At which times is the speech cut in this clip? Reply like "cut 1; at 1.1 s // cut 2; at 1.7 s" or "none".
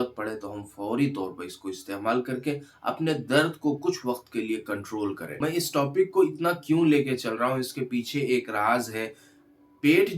cut 1; at 5.2 s